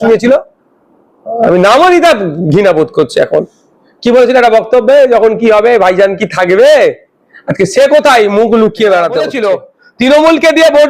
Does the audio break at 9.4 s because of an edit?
yes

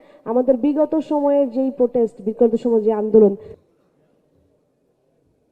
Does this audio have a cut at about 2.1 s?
no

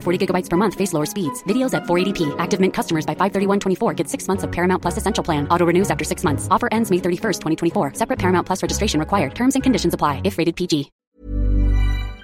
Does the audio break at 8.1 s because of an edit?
no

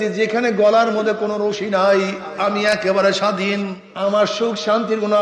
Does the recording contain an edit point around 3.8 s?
yes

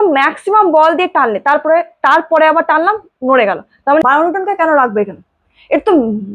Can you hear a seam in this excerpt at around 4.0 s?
yes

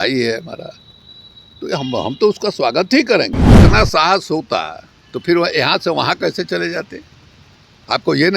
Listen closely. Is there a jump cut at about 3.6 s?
yes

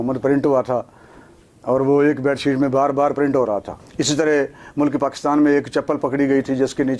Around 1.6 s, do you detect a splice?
no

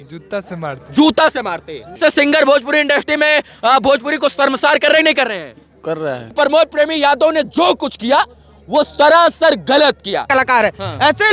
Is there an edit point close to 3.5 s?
no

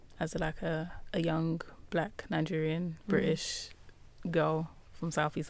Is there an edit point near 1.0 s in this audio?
yes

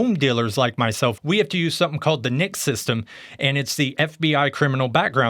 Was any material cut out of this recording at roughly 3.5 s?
no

